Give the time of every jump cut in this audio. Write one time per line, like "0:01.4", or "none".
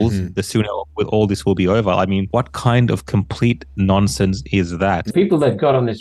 0:02.3
0:05.1